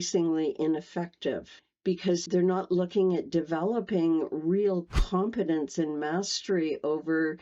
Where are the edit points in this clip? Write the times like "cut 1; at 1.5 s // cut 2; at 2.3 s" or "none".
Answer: cut 1; at 2.2 s